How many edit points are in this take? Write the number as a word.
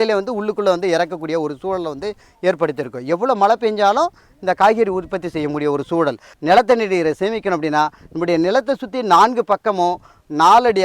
one